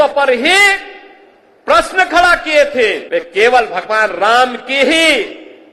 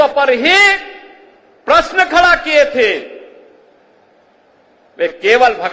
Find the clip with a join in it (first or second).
first